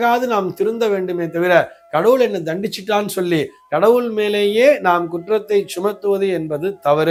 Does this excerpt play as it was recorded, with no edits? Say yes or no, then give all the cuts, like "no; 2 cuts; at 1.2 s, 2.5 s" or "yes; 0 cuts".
yes; 0 cuts